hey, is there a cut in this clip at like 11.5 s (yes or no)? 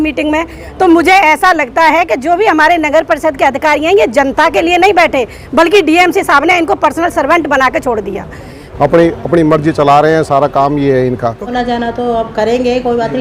yes